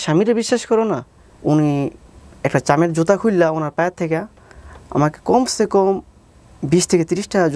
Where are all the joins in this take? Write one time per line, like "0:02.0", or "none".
0:01.1